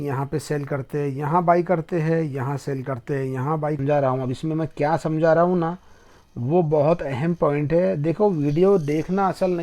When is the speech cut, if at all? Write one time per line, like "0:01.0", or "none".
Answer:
0:03.8